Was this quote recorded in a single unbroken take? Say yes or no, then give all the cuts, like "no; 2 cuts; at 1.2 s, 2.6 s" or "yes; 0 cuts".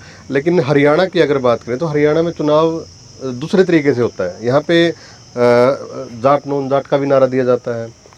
yes; 0 cuts